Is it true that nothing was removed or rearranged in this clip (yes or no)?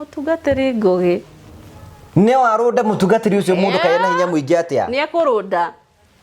no